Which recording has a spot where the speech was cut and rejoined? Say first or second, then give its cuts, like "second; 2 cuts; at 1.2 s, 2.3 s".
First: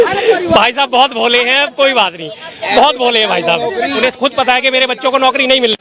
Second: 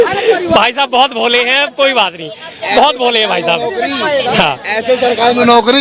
first; 1 cut; at 4.0 s